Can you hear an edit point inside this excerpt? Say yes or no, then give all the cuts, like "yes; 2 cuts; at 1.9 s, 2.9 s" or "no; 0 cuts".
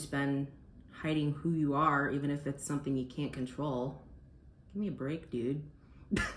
no; 0 cuts